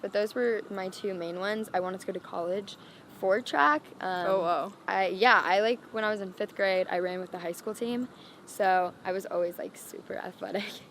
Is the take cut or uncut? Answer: uncut